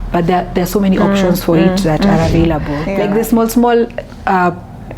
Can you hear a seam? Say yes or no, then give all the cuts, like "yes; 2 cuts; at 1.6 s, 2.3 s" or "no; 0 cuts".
yes; 1 cut; at 2.8 s